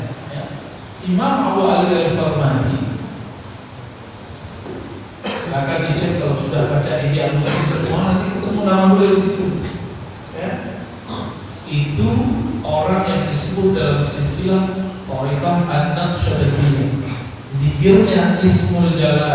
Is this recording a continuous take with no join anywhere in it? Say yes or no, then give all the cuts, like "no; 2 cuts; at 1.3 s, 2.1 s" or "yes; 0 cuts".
no; 1 cut; at 0.9 s